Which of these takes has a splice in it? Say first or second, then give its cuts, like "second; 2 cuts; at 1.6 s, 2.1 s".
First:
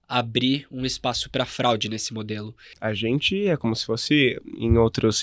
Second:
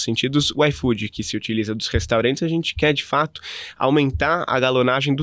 first; 1 cut; at 2.7 s